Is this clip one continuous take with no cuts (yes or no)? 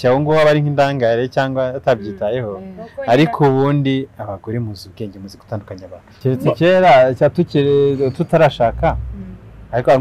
no